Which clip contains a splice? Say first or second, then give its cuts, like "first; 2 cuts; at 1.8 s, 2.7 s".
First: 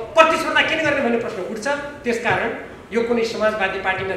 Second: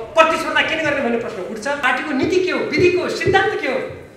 second; 1 cut; at 1.8 s